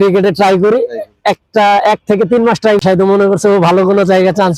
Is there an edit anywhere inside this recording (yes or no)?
yes